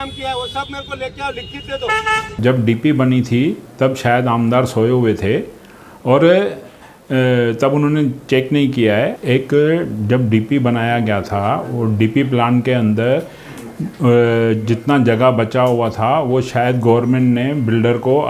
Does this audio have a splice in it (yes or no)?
yes